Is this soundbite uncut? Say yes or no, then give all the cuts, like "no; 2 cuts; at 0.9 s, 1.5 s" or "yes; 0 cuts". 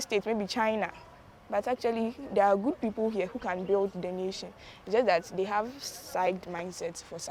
yes; 0 cuts